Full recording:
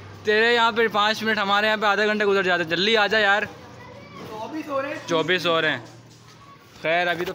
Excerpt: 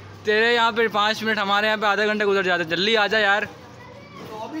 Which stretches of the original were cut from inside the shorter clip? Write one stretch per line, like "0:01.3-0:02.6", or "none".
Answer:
none